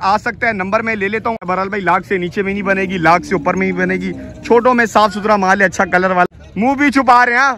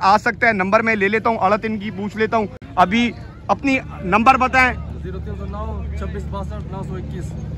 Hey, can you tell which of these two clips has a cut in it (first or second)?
first